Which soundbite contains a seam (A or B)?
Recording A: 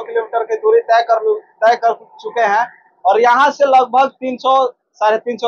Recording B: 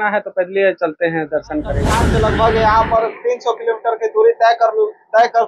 B